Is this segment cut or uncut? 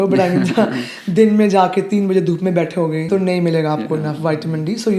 cut